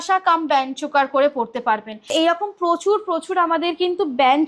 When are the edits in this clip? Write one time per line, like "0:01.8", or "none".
0:02.0

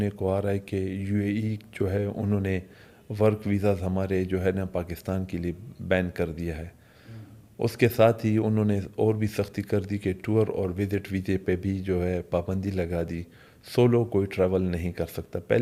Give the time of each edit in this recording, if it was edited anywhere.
none

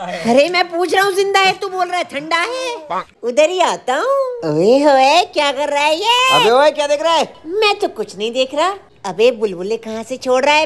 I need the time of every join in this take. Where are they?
0:03.1
0:08.8

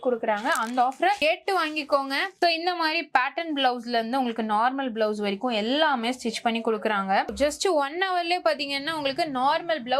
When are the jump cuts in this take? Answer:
0:02.4
0:07.3

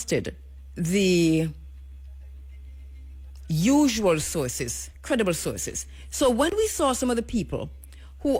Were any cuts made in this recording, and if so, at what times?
none

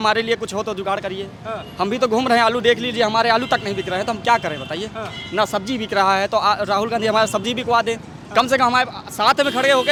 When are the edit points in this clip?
none

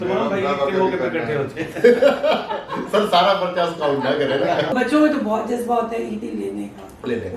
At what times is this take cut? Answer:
0:04.7

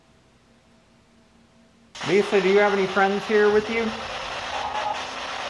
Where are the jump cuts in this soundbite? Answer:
0:02.0

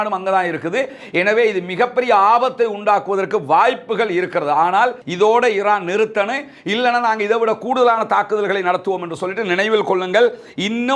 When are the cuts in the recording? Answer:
0:05.0

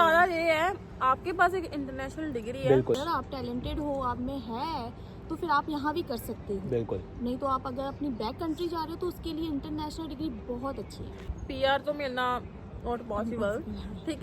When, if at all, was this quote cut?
0:03.0
0:11.3

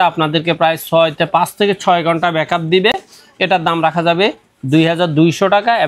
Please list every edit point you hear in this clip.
none

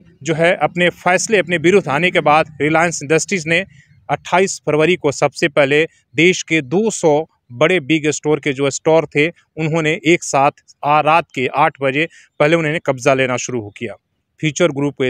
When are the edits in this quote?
none

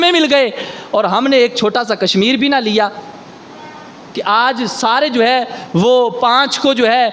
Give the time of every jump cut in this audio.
none

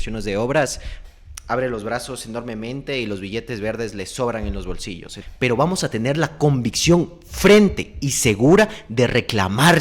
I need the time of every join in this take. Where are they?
0:05.1

